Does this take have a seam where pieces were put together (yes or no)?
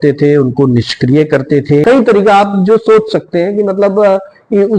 yes